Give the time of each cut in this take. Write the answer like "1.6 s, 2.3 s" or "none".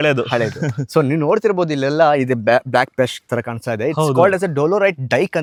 none